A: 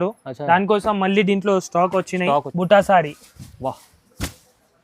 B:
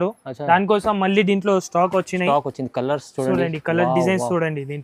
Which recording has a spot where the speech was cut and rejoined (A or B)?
A